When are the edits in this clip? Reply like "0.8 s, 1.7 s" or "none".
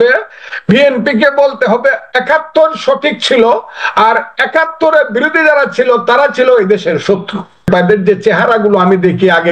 7.7 s